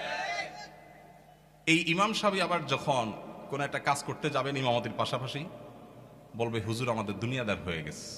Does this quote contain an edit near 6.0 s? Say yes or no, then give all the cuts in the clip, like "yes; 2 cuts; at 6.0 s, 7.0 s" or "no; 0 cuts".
no; 0 cuts